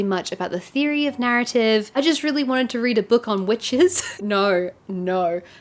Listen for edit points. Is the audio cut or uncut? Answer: cut